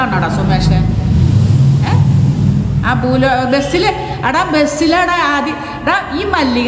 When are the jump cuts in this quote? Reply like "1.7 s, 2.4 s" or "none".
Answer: none